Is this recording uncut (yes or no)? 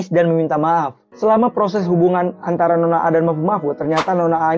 no